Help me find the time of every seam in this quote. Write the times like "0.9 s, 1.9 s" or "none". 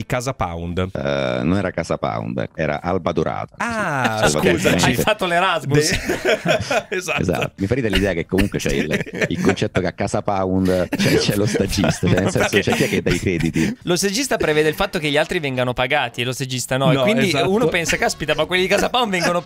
0.9 s, 2.5 s, 7.6 s, 10.9 s, 13.8 s